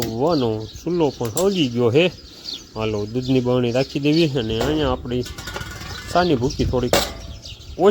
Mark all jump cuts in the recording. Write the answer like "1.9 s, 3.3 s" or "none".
none